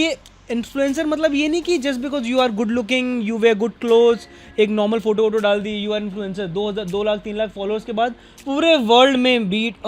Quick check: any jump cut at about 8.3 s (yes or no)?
yes